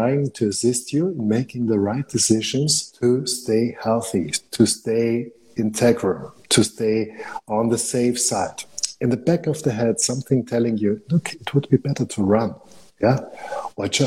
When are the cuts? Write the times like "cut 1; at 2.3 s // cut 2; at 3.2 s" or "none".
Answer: cut 1; at 2.8 s // cut 2; at 8.8 s